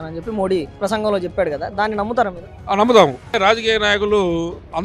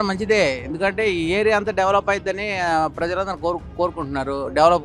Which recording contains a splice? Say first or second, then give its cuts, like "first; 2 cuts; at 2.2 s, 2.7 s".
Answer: first; 2 cuts; at 2.5 s, 3.3 s